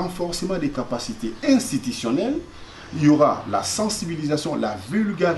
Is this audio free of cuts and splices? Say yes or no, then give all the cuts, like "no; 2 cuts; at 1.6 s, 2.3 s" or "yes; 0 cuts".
yes; 0 cuts